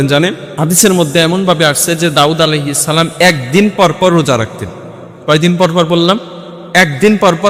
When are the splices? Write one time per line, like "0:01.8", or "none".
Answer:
none